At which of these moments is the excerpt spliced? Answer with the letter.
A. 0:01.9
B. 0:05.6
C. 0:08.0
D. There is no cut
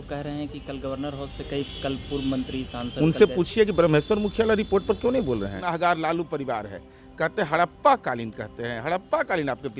B